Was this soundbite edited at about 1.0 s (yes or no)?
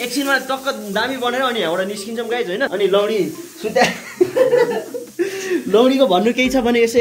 no